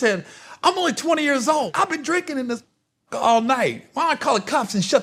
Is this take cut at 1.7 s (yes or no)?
yes